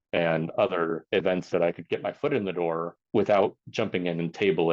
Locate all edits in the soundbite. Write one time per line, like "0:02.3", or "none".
0:01.0
0:03.0
0:03.6